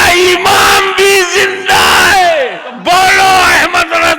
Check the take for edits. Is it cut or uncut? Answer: cut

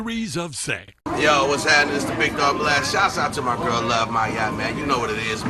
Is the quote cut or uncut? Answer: cut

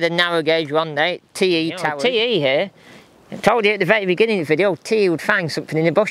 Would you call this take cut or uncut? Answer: cut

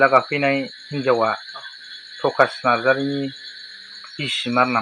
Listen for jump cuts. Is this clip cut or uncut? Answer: uncut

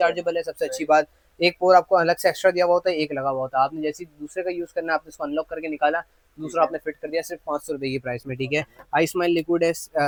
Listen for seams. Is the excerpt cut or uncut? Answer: uncut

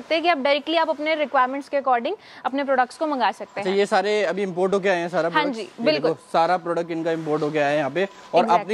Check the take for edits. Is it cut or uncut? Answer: uncut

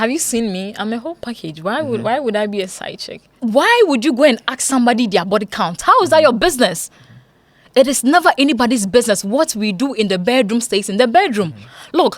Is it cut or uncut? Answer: cut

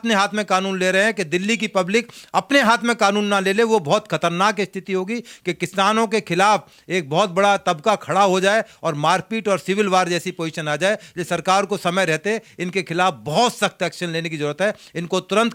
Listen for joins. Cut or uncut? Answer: uncut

